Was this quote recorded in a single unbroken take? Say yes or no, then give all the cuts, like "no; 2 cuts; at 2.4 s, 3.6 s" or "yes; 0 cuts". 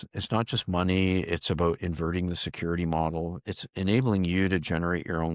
yes; 0 cuts